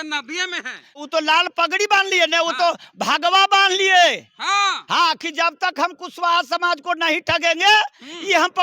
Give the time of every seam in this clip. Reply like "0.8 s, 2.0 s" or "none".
1.0 s